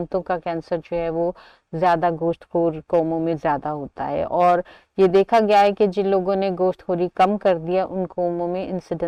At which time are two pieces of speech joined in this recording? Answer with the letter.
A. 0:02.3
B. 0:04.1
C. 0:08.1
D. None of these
D